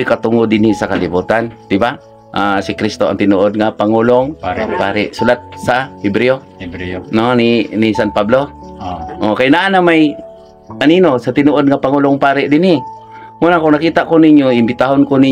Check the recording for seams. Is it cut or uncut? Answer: uncut